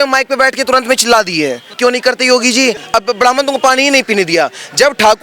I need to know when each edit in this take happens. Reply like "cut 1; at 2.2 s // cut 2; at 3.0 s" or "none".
cut 1; at 1.7 s // cut 2; at 2.8 s

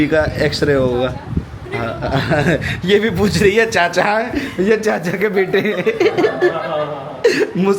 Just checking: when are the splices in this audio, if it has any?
none

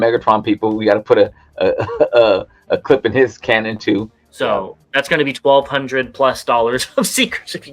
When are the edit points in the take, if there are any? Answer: cut 1; at 4.2 s

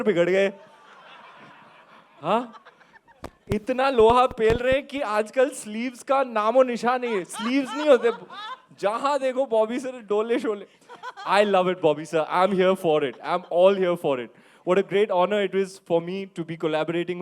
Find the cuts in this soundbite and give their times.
none

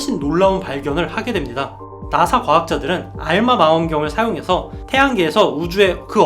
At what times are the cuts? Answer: cut 1; at 1.9 s

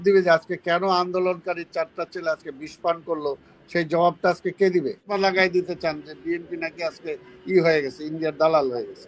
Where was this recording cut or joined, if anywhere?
cut 1; at 5.0 s

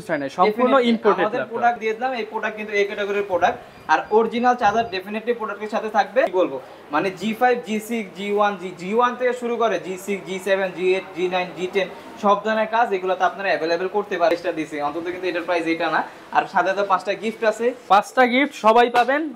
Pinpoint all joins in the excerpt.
cut 1; at 1.8 s // cut 2; at 6.3 s // cut 3; at 14.3 s

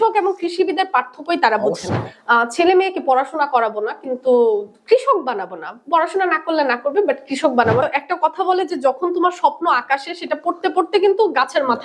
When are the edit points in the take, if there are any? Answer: cut 1; at 2.1 s // cut 2; at 7.8 s

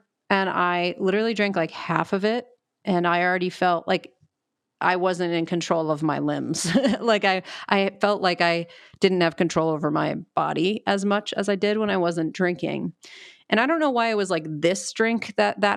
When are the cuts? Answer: none

